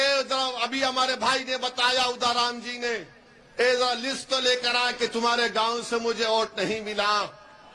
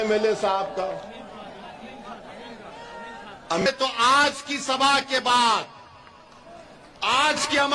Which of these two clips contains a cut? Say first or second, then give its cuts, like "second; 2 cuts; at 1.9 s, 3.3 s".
second; 1 cut; at 3.6 s